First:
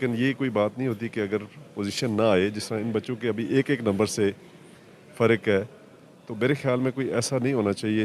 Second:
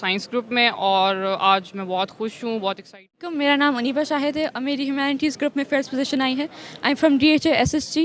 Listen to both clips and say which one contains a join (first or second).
second